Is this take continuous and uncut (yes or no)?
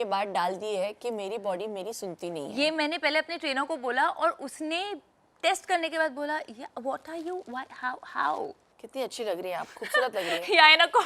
no